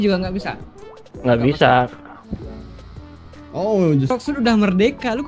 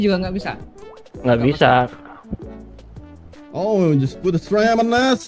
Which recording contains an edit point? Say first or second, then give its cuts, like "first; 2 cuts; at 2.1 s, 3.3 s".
first; 1 cut; at 4.1 s